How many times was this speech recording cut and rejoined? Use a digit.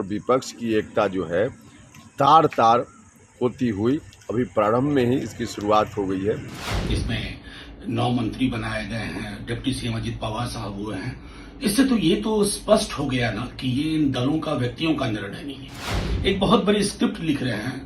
1